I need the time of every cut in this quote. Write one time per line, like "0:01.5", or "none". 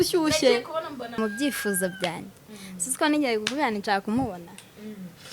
0:01.2